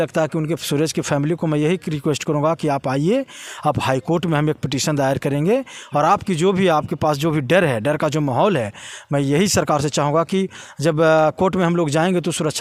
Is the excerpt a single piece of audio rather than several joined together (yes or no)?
yes